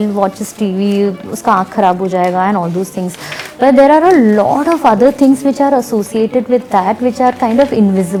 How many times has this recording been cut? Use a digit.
0